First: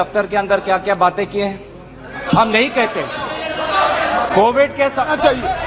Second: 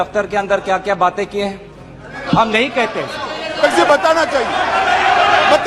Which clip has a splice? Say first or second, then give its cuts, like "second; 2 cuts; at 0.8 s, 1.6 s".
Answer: second; 1 cut; at 3.6 s